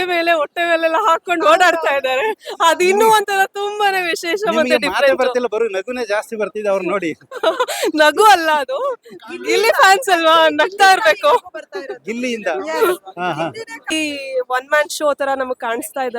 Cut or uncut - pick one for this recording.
cut